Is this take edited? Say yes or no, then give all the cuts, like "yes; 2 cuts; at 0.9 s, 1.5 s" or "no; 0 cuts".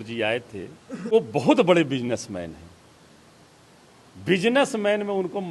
yes; 1 cut; at 1.1 s